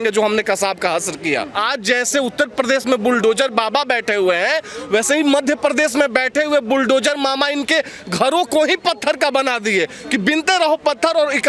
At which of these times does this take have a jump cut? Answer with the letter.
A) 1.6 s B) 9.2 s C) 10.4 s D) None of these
A